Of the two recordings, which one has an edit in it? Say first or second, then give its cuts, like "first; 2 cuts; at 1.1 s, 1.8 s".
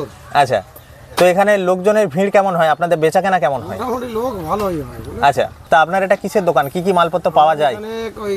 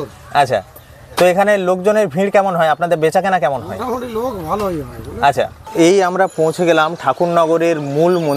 second; 1 cut; at 5.6 s